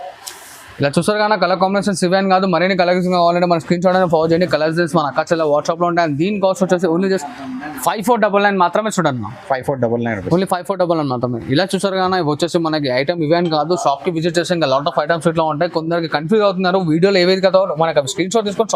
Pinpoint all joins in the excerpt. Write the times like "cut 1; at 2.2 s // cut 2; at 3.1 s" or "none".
none